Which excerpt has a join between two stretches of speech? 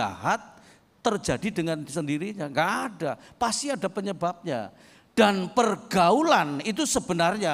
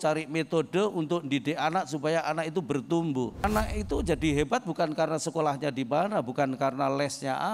second; 1 cut; at 3.4 s

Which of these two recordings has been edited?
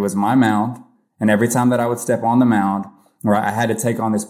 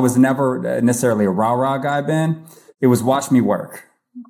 second; 1 cut; at 2.7 s

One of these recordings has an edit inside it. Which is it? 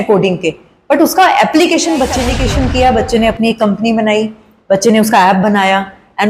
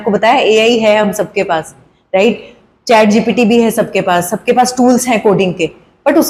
first; 1 cut; at 2.3 s

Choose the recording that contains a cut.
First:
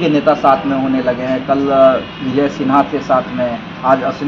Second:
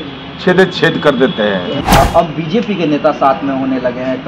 second; 1 cut; at 1.8 s

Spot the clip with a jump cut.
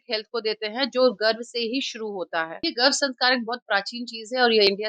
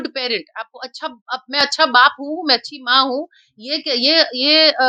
first; 1 cut; at 2.6 s

